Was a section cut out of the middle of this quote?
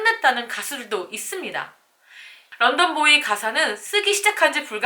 yes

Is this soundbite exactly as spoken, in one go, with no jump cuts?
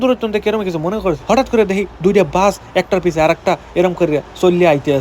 no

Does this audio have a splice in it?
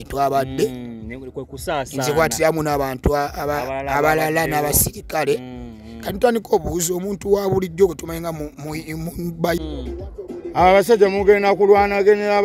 yes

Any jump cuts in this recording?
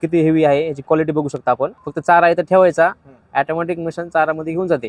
yes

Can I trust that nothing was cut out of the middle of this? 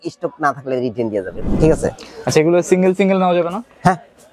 no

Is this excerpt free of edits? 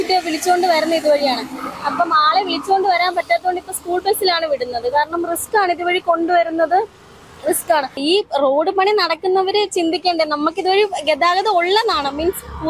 no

